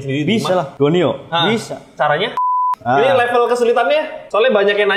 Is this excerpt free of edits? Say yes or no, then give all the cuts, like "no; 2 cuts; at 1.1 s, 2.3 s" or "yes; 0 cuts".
no; 1 cut; at 2.4 s